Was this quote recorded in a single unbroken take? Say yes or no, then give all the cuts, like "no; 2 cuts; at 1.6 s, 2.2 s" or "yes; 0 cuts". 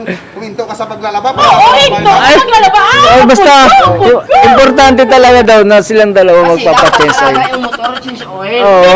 yes; 0 cuts